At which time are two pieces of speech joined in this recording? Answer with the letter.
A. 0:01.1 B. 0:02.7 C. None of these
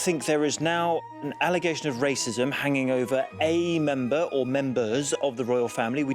A